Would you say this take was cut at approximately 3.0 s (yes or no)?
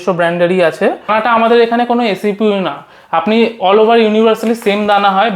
no